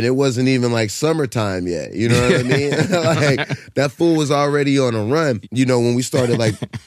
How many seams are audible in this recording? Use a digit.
1